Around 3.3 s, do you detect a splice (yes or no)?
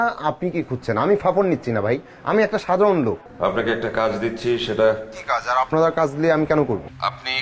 yes